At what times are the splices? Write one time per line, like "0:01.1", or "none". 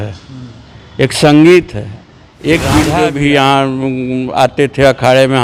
0:03.0